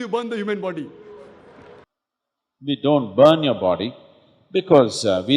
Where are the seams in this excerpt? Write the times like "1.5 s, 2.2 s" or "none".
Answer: 1.8 s